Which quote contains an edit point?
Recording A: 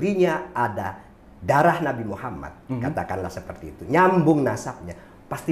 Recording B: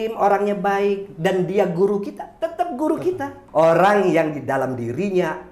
B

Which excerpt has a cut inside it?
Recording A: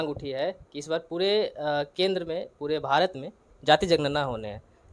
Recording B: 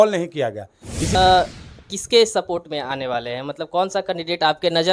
B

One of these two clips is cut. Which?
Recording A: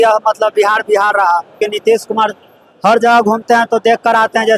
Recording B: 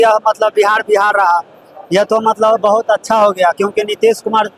A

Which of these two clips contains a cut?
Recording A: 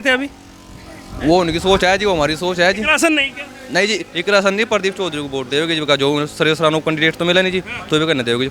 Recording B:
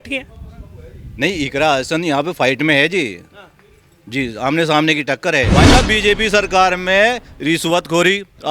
B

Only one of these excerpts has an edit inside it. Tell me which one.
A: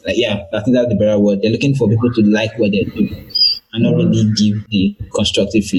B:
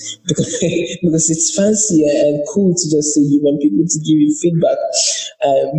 A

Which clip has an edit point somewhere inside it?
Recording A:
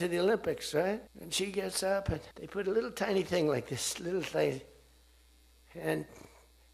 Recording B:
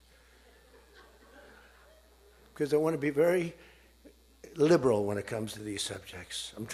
A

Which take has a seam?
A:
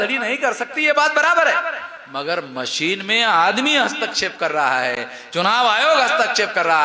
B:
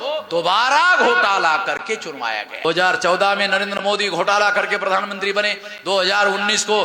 B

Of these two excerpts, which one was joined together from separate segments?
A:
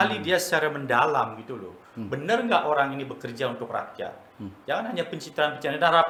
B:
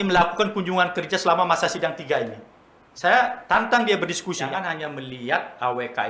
B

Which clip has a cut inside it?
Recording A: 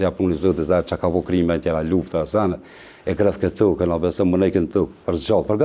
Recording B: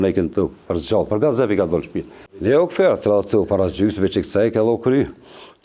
B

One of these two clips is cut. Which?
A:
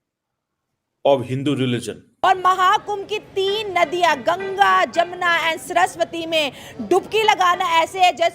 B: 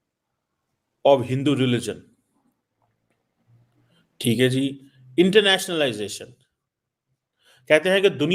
A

